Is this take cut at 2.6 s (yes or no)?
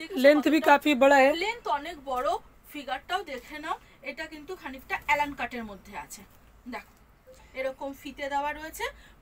no